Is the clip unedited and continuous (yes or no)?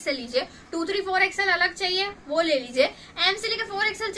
yes